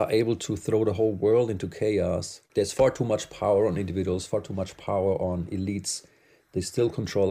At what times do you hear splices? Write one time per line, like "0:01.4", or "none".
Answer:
0:02.4
0:04.2